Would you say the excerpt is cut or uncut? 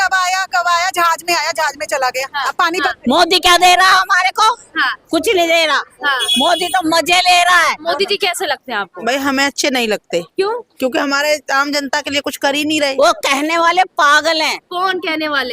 cut